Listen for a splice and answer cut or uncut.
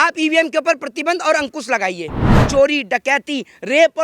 cut